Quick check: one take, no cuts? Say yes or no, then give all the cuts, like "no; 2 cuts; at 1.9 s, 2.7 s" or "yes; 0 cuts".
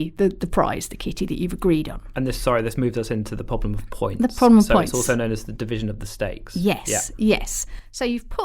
yes; 0 cuts